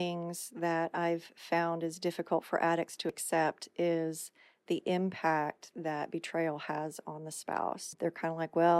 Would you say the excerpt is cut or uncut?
cut